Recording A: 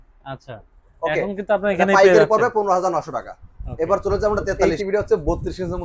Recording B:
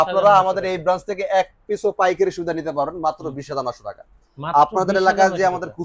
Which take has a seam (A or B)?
A